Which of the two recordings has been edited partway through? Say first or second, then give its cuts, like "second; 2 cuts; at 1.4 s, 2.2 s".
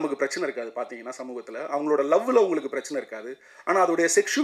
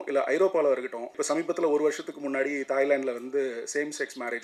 second; 1 cut; at 1.1 s